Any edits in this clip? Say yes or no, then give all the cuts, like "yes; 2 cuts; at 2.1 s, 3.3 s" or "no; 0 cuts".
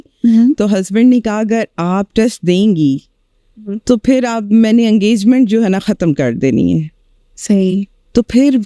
no; 0 cuts